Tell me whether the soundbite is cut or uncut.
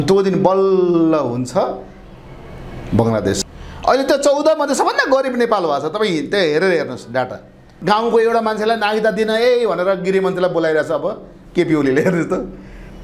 cut